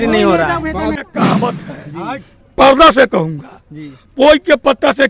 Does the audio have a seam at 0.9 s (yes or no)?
yes